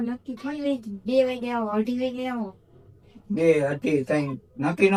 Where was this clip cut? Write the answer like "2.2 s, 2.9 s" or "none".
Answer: none